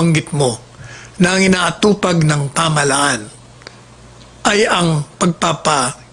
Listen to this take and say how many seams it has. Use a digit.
0